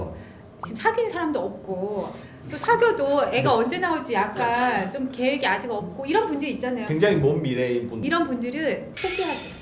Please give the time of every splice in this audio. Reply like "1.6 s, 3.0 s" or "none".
7.9 s